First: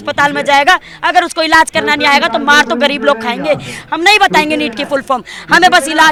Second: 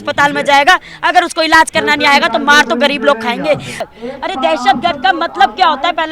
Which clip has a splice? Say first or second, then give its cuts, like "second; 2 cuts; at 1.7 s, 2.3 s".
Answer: second; 1 cut; at 3.8 s